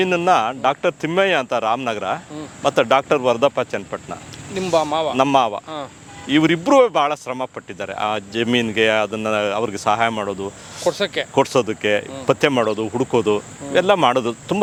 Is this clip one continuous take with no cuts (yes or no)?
yes